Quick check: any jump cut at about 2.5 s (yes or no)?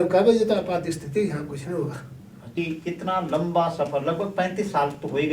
yes